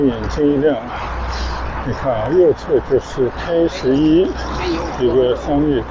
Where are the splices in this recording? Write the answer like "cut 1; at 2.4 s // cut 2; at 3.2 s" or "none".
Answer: none